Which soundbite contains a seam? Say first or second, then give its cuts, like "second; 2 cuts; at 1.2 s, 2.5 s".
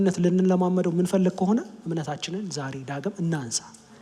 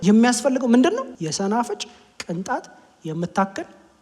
second; 1 cut; at 1.1 s